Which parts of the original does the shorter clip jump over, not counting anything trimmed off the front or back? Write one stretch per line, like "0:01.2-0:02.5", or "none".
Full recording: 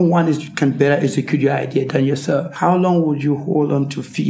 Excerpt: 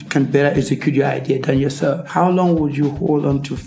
none